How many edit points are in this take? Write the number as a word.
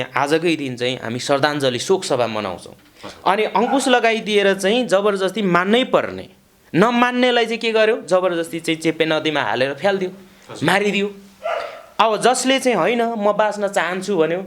one